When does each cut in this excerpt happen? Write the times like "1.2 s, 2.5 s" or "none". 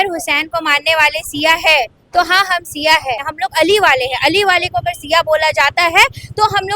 3.3 s